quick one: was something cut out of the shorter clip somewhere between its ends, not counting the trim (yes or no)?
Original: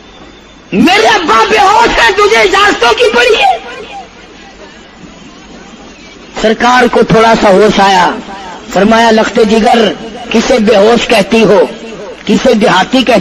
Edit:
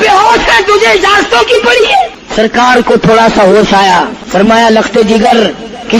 yes